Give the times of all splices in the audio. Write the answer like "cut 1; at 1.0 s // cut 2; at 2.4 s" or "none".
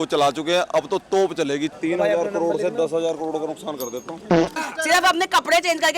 cut 1; at 1.7 s // cut 2; at 4.6 s

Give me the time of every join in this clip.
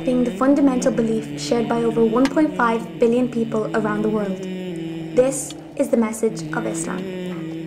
none

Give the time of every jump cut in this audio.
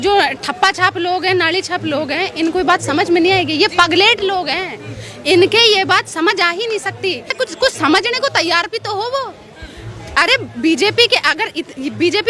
cut 1; at 7.3 s

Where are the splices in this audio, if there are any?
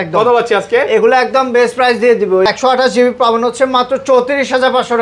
cut 1; at 2.5 s

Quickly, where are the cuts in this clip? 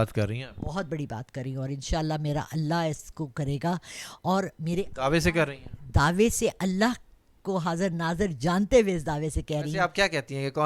cut 1; at 9.7 s

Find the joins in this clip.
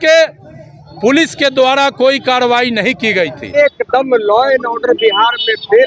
cut 1; at 3.6 s

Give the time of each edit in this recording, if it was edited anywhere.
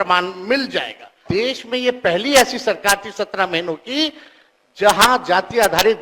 cut 1; at 1.2 s

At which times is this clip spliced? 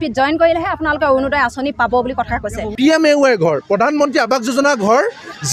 cut 1; at 2.7 s

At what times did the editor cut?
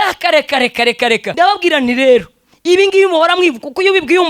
cut 1; at 1.3 s

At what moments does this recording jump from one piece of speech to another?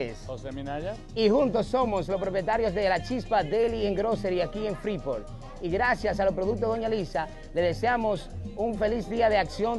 cut 1; at 6.8 s

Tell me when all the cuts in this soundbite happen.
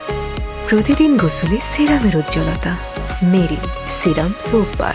none

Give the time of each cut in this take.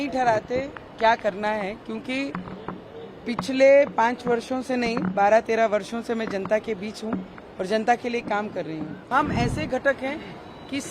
cut 1; at 9.1 s

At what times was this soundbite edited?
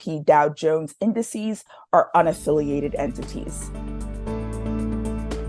cut 1; at 3.6 s

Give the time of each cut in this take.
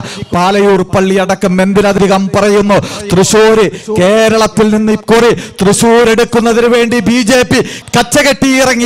cut 1; at 2.0 s

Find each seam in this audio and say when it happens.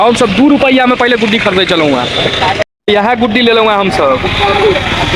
cut 1; at 2.7 s

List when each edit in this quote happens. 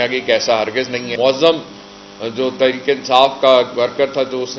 cut 1; at 1.1 s

